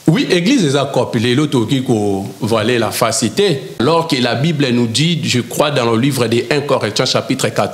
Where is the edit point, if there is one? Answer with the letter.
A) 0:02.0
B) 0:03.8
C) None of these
B